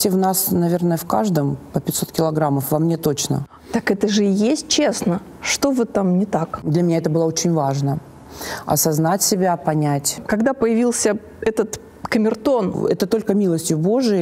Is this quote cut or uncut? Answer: cut